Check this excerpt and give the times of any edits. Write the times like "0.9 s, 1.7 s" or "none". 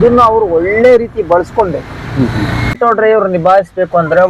2.7 s